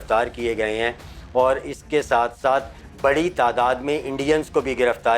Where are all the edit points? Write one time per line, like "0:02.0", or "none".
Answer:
none